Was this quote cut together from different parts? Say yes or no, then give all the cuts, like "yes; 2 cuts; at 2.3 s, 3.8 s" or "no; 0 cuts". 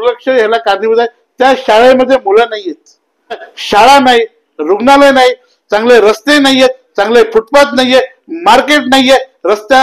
yes; 1 cut; at 3.5 s